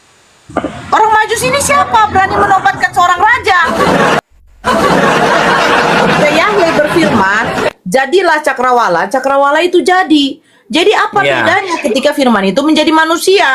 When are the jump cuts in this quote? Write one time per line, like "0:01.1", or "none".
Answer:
0:04.2